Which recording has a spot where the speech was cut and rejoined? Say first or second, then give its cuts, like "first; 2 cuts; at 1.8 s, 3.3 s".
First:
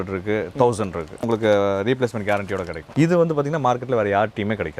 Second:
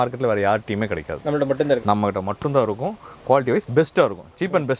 first; 2 cuts; at 1.2 s, 2.8 s